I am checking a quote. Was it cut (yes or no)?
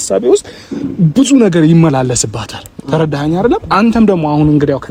no